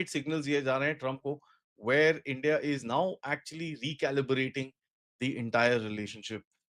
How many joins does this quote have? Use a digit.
0